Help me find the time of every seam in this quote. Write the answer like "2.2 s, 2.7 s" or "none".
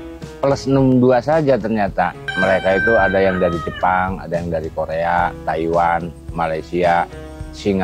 2.3 s